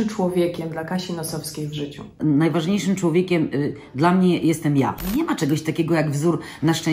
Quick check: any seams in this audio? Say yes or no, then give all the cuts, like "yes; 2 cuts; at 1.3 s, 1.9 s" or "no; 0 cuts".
yes; 2 cuts; at 2.2 s, 5.0 s